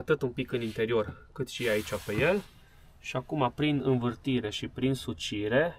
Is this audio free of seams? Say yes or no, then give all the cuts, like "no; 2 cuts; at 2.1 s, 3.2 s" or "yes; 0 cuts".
yes; 0 cuts